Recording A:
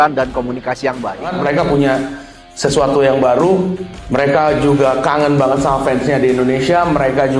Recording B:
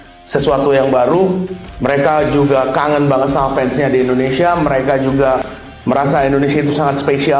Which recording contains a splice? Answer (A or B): A